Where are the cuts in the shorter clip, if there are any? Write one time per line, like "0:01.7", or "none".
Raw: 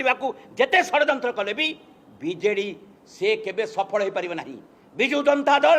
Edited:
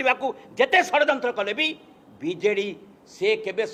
none